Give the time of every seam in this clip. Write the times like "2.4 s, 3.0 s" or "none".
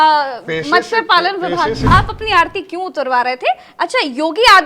1.9 s